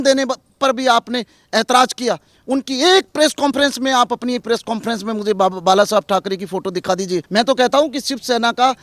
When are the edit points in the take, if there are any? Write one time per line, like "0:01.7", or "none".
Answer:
0:07.3